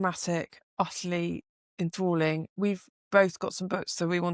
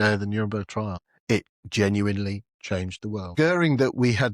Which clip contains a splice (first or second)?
second